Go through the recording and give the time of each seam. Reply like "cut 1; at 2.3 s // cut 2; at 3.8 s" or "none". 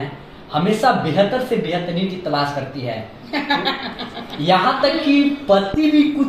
none